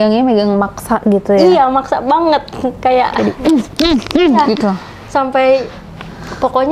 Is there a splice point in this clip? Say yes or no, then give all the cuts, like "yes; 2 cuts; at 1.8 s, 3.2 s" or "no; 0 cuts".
no; 0 cuts